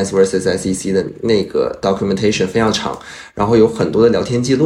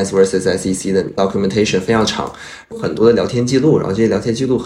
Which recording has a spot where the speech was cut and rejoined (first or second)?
second